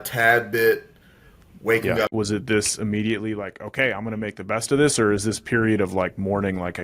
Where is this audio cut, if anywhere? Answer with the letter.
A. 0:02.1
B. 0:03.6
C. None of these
A